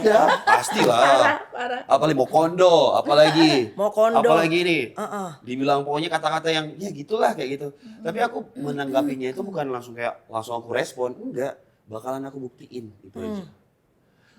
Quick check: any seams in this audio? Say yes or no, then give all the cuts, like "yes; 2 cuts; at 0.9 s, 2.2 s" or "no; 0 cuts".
no; 0 cuts